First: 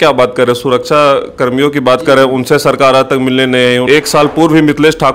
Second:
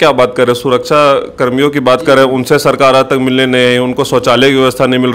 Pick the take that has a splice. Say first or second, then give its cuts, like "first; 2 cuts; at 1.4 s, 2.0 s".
first; 1 cut; at 3.8 s